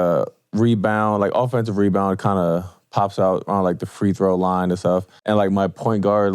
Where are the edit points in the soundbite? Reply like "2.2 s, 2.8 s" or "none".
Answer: 5.1 s